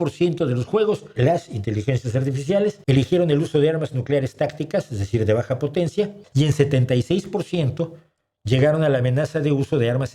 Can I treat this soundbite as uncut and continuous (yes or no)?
no